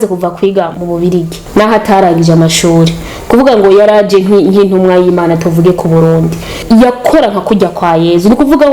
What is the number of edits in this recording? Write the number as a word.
two